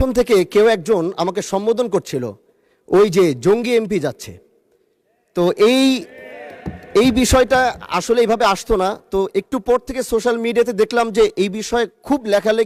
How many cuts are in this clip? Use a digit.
0